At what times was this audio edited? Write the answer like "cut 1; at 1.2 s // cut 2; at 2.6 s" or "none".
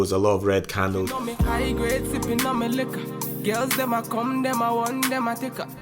cut 1; at 1.2 s